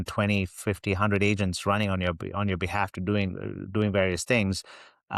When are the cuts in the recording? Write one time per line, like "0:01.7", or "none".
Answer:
none